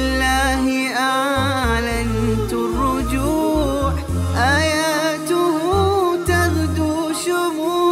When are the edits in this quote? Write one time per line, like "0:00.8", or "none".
none